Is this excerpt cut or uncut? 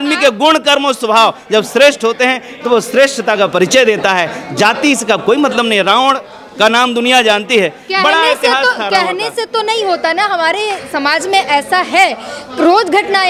uncut